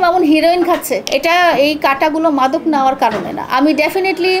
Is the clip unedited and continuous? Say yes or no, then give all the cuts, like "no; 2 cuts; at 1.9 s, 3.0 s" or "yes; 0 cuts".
no; 1 cut; at 1.1 s